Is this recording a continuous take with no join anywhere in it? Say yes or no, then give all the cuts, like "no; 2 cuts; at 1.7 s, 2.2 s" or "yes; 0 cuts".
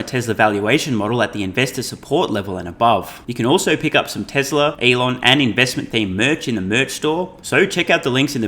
no; 3 cuts; at 3.2 s, 4.8 s, 7.4 s